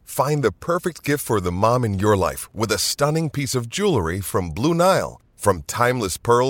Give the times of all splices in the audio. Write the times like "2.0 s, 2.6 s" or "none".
none

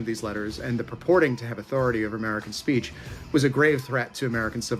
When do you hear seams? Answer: none

